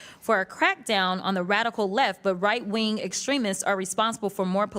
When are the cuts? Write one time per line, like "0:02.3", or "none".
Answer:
none